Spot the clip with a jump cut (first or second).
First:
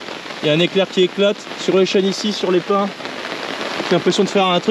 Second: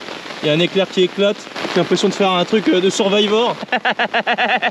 second